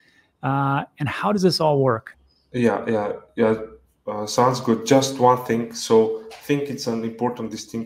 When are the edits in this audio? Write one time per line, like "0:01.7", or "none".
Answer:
0:02.1